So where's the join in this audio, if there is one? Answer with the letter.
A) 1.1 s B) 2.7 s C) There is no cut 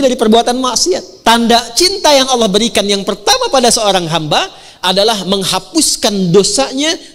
A